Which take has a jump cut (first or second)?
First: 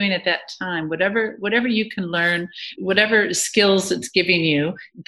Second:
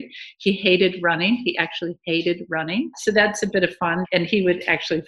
second